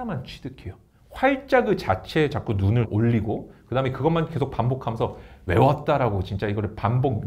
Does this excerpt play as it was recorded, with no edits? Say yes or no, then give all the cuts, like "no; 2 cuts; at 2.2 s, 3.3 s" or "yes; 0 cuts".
yes; 0 cuts